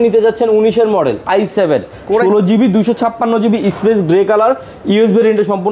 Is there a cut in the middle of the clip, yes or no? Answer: no